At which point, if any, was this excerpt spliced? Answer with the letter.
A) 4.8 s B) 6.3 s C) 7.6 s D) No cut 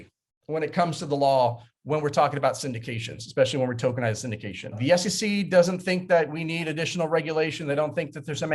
A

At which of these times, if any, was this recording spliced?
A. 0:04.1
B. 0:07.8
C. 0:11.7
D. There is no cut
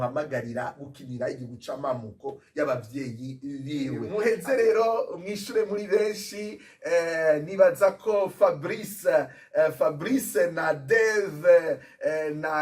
A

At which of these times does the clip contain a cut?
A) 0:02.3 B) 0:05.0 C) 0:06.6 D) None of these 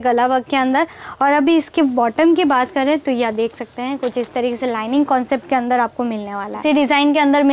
C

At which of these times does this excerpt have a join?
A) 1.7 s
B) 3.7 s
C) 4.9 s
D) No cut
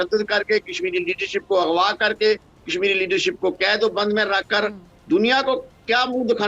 D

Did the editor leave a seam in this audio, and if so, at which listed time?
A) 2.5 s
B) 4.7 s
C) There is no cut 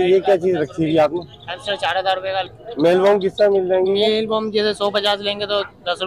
A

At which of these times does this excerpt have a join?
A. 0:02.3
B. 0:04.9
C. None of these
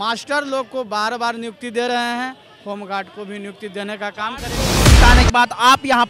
B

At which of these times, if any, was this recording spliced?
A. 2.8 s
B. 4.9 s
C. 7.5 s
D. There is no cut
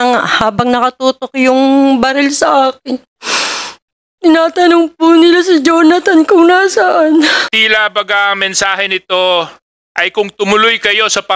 C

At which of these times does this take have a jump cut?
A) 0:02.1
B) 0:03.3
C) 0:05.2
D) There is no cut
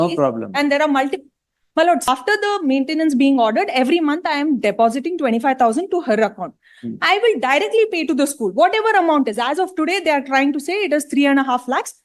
A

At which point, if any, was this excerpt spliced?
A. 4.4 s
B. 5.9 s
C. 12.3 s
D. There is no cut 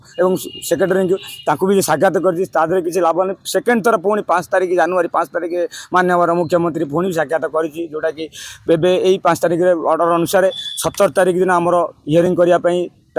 C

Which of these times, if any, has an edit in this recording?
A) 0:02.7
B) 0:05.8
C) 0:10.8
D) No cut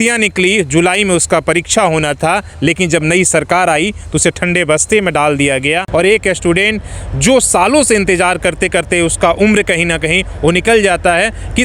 B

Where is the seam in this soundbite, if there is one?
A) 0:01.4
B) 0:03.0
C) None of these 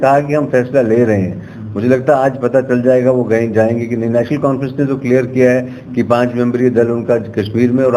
C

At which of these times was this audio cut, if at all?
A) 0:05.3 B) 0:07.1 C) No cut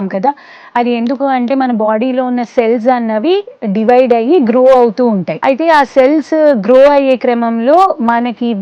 A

